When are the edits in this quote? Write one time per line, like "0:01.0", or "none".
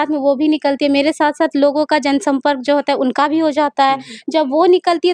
none